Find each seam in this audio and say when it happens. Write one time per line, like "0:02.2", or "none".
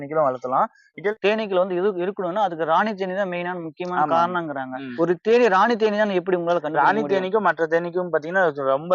0:01.1
0:04.9